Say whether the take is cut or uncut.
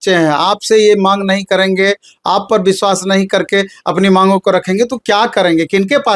uncut